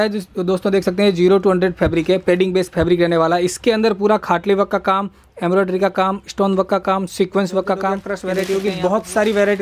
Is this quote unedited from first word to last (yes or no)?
no